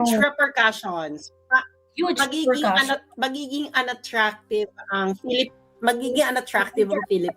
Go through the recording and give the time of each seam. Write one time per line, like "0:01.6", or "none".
none